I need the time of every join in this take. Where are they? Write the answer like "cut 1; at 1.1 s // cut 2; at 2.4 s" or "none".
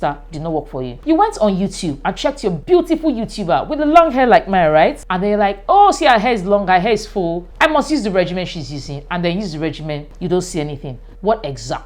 cut 1; at 1.0 s // cut 2; at 2.6 s // cut 3; at 5.1 s // cut 4; at 7.4 s // cut 5; at 10.1 s